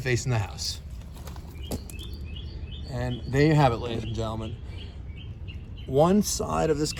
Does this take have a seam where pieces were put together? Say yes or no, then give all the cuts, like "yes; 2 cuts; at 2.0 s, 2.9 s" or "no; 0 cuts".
no; 0 cuts